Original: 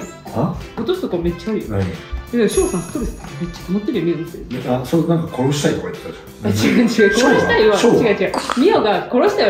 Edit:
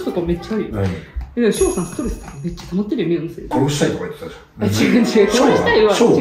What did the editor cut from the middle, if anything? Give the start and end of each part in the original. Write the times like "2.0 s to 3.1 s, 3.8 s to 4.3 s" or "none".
4.4 s to 5.3 s